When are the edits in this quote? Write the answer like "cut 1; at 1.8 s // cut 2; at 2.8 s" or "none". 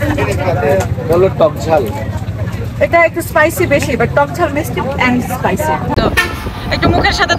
cut 1; at 5.9 s